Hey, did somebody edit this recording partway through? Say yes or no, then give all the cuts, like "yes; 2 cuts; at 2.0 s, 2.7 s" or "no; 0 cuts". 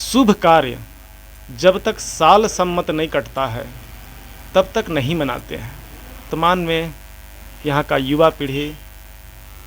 yes; 1 cut; at 6.3 s